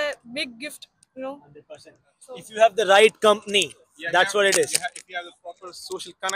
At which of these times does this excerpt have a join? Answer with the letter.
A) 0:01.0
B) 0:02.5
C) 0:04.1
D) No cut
D